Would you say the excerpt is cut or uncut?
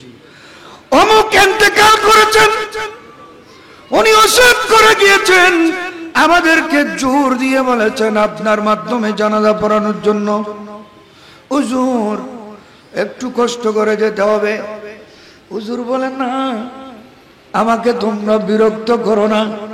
uncut